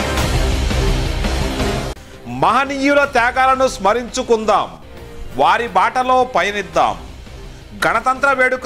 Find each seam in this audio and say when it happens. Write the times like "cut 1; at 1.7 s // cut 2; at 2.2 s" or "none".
cut 1; at 2.1 s